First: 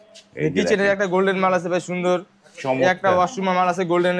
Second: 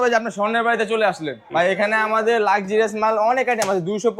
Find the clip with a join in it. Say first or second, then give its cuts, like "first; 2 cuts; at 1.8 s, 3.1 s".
second; 1 cut; at 1.5 s